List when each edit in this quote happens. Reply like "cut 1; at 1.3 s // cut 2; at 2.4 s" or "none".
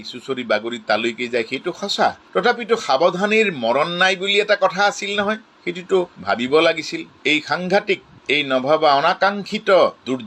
cut 1; at 7.1 s